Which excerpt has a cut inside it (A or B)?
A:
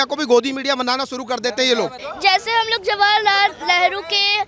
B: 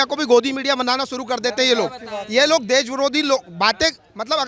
A